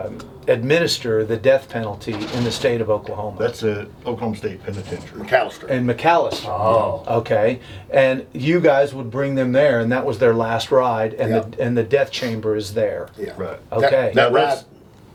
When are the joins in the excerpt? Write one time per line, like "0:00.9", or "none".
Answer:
none